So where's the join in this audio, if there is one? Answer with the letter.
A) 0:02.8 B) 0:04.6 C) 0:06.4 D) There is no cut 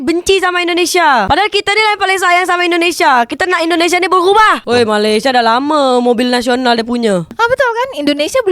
B